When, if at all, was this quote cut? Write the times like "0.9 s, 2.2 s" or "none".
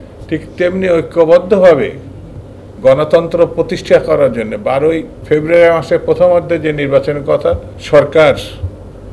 5.1 s, 7.7 s